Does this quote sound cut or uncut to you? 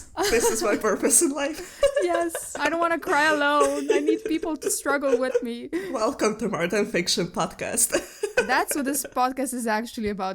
cut